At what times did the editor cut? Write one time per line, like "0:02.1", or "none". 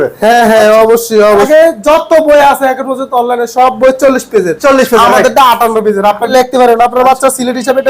0:01.5
0:06.3